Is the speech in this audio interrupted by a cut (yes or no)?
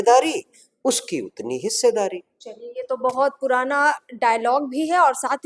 no